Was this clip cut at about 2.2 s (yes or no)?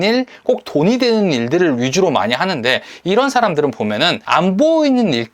no